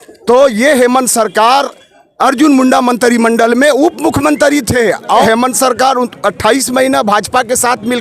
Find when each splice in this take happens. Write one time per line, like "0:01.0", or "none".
0:05.2

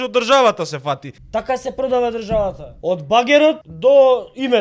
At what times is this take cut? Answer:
0:01.1
0:02.7
0:03.7

